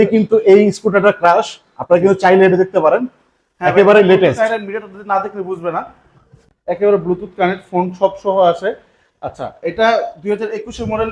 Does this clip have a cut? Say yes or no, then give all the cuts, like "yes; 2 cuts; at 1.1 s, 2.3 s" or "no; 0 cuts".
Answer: no; 0 cuts